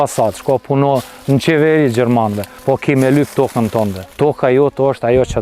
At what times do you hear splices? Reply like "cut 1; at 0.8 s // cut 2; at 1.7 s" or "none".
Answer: cut 1; at 2.5 s // cut 2; at 4.0 s